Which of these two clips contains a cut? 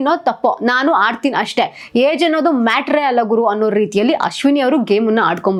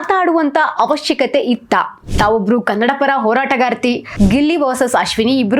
second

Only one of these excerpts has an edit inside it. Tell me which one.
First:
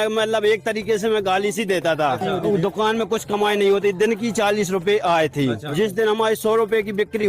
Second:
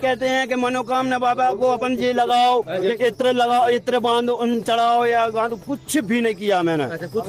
first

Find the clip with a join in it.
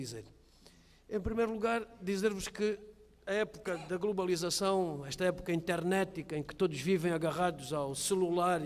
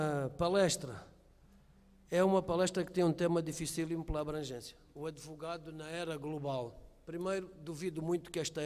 first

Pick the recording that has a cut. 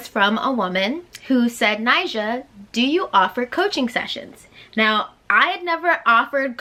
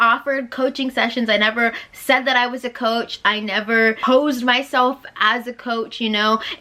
second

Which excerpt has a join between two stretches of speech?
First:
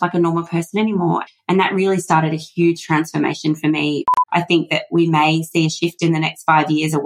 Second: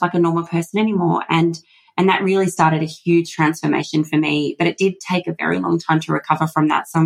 first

